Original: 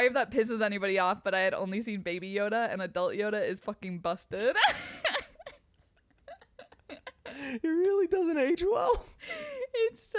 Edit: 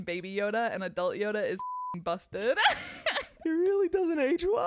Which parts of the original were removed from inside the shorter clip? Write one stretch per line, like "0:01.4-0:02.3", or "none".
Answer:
0:05.3-0:07.5